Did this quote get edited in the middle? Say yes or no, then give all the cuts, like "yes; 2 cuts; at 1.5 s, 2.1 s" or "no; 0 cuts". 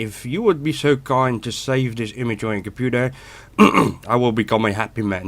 yes; 1 cut; at 1.7 s